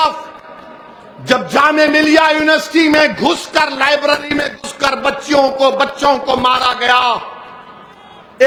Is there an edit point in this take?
no; 0 cuts

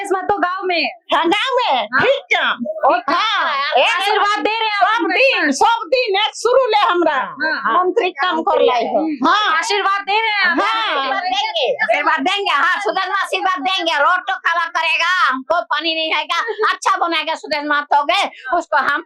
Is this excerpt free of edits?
yes; 0 cuts

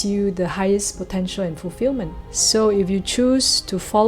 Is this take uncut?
no; 1 cut; at 2.2 s

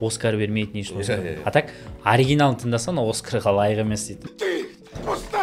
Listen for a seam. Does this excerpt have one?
no; 0 cuts

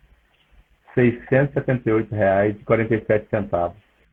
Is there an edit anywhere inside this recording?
no; 0 cuts

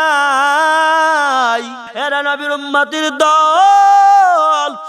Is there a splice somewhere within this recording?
yes; 1 cut; at 1.8 s

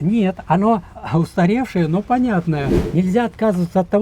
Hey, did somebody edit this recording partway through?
yes; 2 cuts; at 0.9 s, 2.8 s

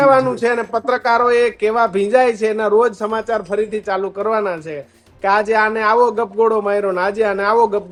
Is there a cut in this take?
no; 0 cuts

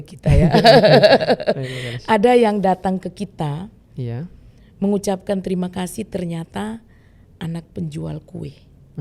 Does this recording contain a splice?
no; 0 cuts

